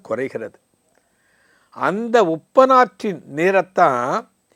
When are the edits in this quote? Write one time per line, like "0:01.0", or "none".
none